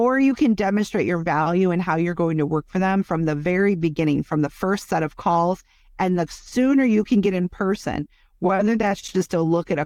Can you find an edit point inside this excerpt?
no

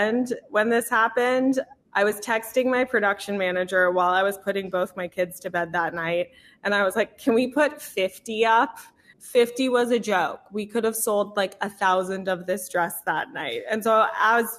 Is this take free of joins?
yes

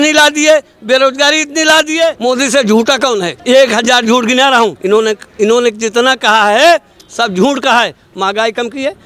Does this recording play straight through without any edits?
no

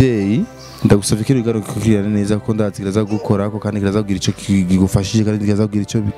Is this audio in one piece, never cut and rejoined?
yes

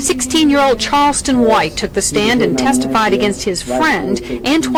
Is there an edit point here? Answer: no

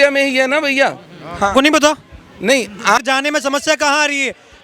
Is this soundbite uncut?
no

